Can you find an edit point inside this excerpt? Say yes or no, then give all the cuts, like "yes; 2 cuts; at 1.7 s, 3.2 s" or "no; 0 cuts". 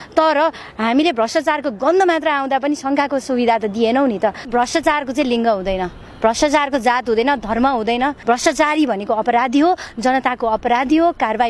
yes; 2 cuts; at 4.5 s, 8.2 s